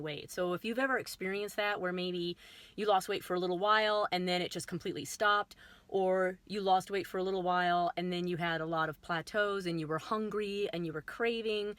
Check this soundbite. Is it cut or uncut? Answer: uncut